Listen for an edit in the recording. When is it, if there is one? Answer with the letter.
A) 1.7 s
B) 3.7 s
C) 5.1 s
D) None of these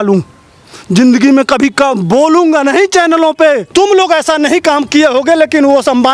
B